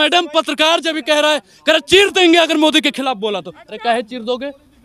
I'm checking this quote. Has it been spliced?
no; 0 cuts

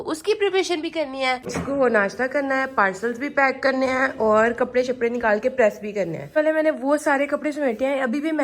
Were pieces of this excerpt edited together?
yes; 2 cuts; at 1.5 s, 6.3 s

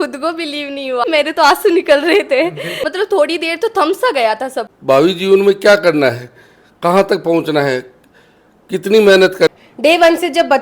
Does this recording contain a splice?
yes; 4 cuts; at 1.1 s, 2.7 s, 4.7 s, 9.5 s

